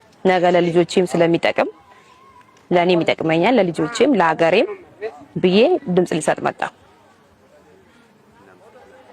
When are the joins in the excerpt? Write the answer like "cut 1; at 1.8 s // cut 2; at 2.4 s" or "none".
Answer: cut 1; at 7.3 s